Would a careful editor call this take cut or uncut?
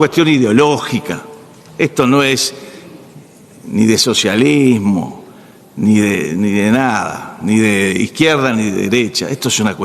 uncut